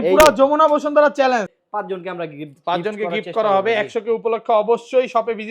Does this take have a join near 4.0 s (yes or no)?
no